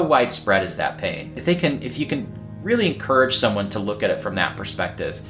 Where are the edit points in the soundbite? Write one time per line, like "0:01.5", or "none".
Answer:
none